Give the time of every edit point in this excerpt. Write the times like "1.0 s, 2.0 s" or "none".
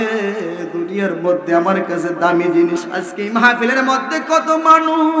2.9 s